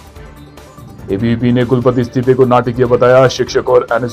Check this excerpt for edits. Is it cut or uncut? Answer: cut